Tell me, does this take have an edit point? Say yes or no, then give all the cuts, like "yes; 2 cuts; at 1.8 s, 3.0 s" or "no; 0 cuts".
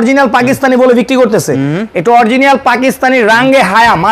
no; 0 cuts